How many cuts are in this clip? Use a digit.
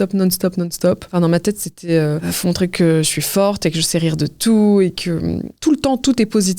3